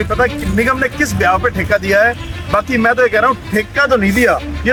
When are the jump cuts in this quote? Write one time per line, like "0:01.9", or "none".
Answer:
none